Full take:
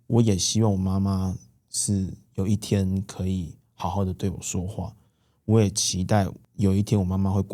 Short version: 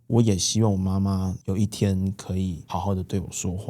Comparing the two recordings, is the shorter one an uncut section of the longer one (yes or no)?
no